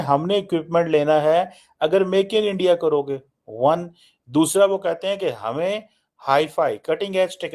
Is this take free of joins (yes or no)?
yes